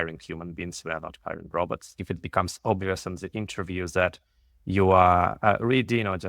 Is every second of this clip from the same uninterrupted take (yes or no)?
no